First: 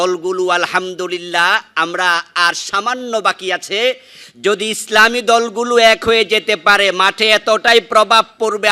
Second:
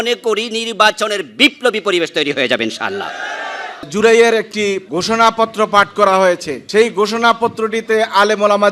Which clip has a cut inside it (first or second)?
second